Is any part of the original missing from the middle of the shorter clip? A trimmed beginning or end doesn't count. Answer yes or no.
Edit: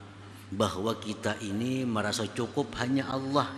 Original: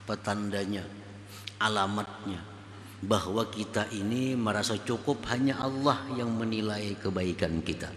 no